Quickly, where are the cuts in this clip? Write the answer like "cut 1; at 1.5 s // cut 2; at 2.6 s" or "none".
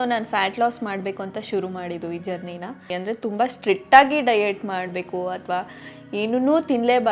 cut 1; at 2.9 s